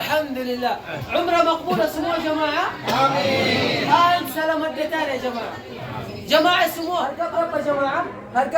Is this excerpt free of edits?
no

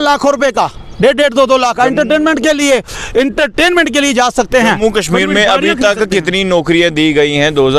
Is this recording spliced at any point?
no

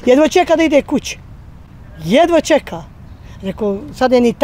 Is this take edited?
no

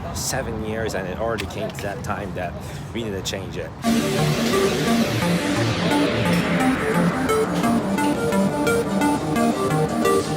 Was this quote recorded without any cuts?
yes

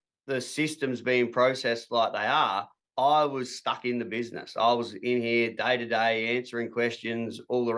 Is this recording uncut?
yes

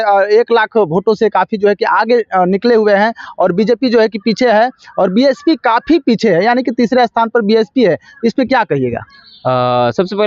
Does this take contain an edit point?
no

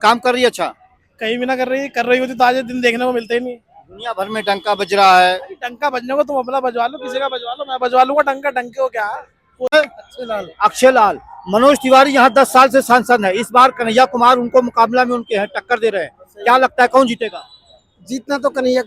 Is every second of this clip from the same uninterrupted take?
no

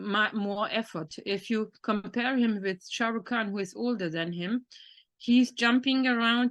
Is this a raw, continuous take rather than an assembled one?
yes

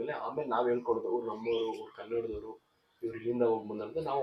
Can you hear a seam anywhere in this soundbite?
no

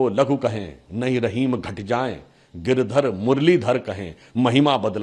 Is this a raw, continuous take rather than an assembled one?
yes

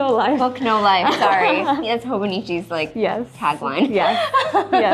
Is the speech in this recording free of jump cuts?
no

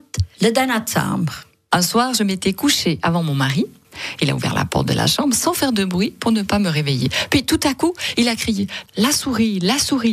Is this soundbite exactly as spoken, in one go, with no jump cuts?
yes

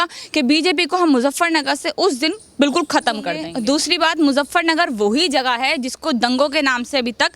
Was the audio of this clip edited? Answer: yes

